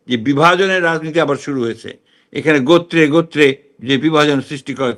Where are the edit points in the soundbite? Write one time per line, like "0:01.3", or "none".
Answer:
none